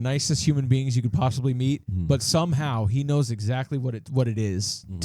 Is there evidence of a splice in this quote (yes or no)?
no